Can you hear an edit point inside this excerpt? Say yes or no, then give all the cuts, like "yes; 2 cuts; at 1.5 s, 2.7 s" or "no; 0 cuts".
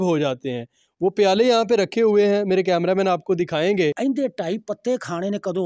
yes; 1 cut; at 4.0 s